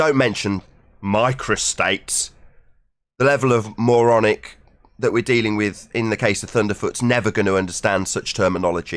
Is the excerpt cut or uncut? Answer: uncut